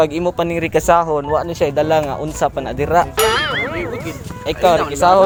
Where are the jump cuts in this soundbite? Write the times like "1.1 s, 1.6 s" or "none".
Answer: none